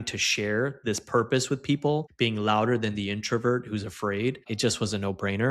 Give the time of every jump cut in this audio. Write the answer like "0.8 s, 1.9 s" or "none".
2.1 s, 4.5 s